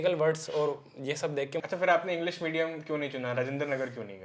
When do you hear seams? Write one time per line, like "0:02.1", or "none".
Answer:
0:01.6

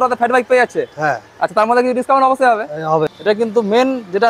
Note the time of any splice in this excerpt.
0:03.1

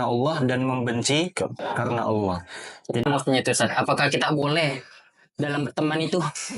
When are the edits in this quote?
0:03.1

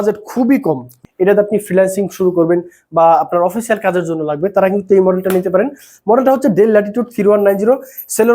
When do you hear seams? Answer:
0:00.9

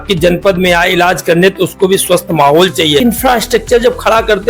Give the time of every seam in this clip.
0:03.0

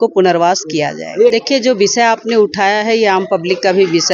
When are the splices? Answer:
none

